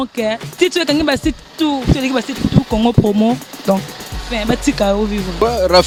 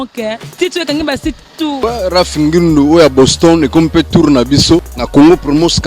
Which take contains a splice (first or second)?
second